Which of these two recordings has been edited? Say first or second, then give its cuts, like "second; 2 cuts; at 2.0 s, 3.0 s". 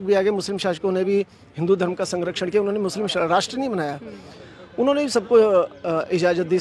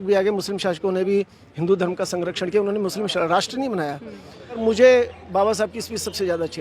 second; 1 cut; at 4.6 s